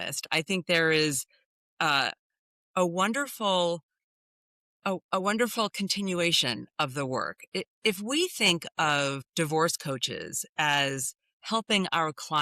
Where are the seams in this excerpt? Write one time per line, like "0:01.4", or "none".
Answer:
0:09.2